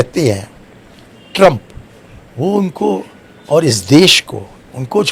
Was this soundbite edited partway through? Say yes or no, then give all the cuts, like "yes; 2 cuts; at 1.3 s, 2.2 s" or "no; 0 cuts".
no; 0 cuts